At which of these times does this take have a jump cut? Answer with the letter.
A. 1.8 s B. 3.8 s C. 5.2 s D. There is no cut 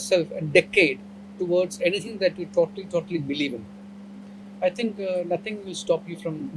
D